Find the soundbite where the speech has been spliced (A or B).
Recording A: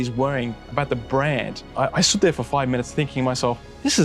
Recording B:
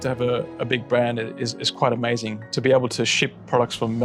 A